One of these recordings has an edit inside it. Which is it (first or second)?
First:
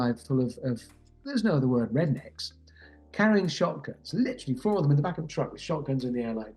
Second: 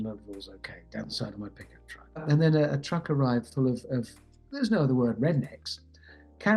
second